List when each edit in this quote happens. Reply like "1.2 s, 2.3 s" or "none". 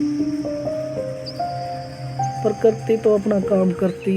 2.4 s